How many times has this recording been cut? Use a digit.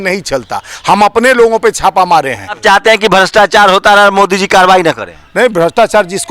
1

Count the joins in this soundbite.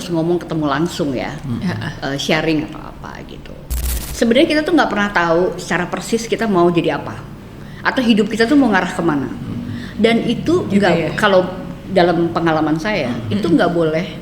1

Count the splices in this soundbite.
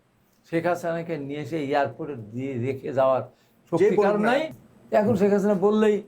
1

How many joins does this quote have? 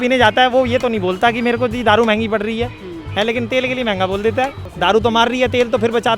1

